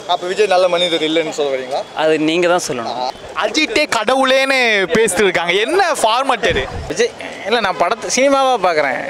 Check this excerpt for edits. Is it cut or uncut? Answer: cut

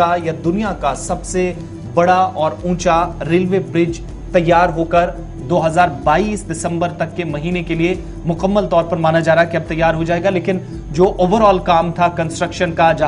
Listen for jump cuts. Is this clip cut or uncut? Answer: uncut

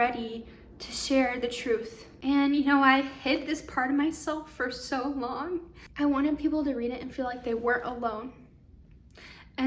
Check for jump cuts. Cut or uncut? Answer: cut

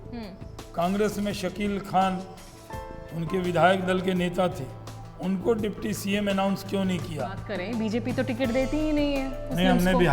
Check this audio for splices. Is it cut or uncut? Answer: cut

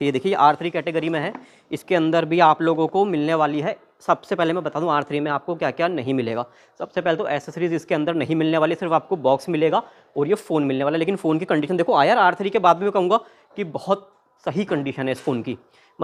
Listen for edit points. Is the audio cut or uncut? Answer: uncut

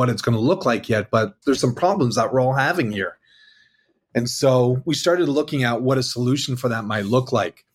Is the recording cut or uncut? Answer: uncut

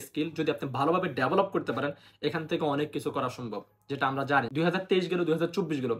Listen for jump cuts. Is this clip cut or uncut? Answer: cut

